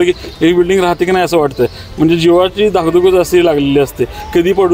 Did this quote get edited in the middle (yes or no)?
no